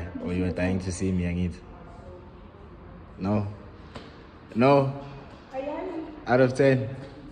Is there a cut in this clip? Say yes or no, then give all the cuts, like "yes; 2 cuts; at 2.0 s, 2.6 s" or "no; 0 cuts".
no; 0 cuts